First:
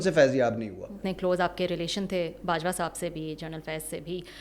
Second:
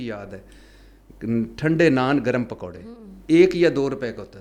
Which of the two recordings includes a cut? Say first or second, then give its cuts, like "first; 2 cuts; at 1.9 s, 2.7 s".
first; 1 cut; at 1.0 s